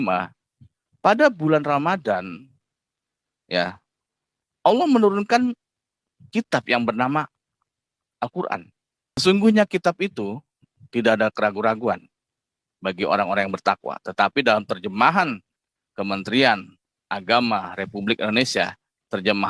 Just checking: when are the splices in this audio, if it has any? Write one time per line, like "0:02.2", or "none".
0:09.2